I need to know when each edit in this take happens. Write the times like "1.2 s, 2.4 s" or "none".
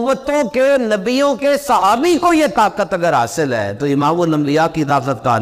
none